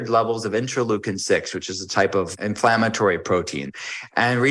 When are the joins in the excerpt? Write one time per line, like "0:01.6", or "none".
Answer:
0:02.3
0:03.7